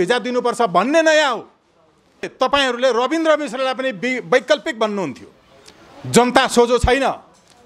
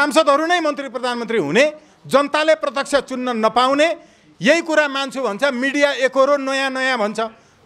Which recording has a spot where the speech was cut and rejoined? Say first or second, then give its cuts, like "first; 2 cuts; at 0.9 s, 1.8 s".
first; 1 cut; at 2.2 s